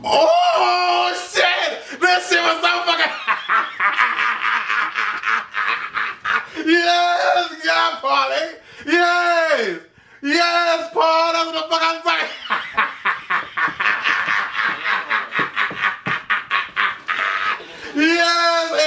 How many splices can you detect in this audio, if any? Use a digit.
0